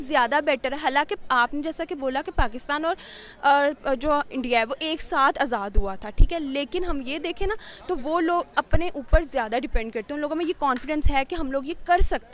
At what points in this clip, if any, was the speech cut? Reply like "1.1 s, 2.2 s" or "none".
none